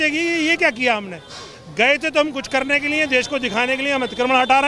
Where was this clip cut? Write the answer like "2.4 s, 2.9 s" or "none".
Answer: none